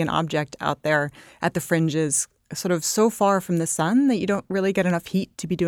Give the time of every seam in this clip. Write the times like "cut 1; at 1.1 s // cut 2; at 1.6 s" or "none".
none